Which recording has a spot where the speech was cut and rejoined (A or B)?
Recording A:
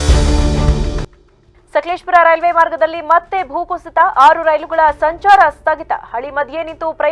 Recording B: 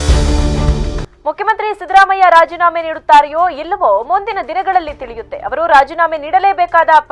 A